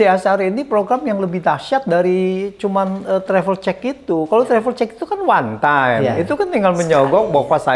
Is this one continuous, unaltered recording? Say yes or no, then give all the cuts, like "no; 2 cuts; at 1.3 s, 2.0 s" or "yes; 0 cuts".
yes; 0 cuts